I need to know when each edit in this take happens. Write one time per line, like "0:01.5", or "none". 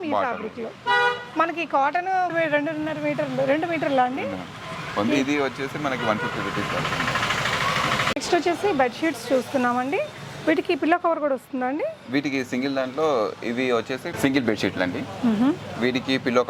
none

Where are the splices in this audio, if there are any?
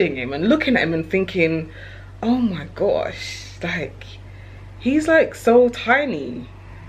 none

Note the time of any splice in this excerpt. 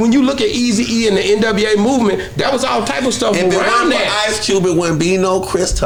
none

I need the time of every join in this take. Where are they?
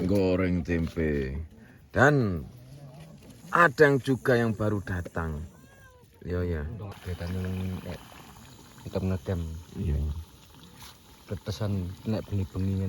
0:06.9

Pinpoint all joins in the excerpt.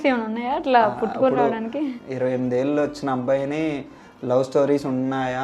0:02.0

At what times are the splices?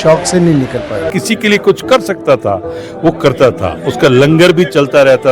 0:01.1

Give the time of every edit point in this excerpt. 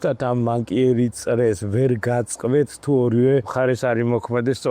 0:03.5

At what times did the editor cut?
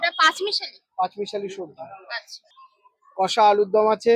0:02.9

